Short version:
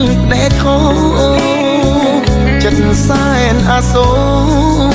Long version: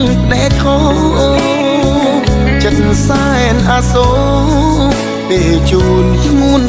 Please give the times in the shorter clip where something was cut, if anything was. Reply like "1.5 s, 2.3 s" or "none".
none